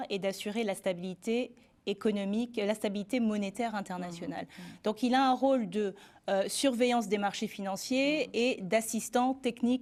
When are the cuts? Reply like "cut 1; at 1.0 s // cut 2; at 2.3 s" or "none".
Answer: none